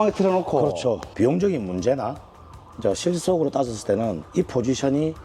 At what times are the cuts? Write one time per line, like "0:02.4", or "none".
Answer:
0:01.1